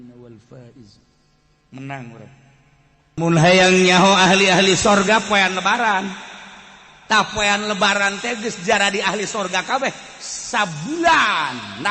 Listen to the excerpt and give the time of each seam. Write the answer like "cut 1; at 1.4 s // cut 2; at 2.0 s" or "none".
cut 1; at 3.2 s